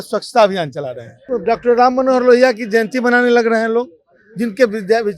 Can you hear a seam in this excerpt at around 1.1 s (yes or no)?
yes